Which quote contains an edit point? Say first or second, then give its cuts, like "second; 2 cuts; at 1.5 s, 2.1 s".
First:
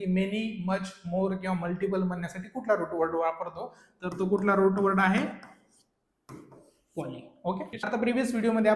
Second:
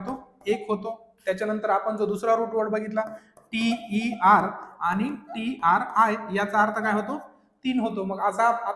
first; 1 cut; at 7.7 s